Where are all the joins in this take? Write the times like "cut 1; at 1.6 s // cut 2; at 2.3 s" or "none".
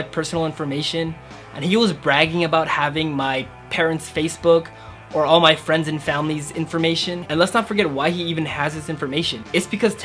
cut 1; at 7.2 s